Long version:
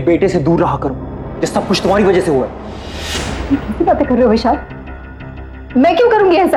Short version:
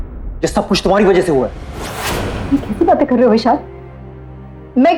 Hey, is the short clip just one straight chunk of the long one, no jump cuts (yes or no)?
yes